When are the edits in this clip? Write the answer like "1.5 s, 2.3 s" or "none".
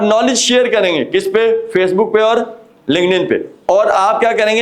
none